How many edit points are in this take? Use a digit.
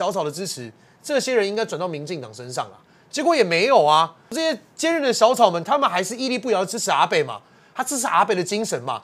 1